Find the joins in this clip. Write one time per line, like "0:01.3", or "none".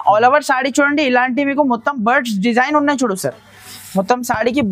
none